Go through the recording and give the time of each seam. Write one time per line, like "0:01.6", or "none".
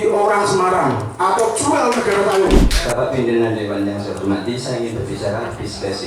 0:02.8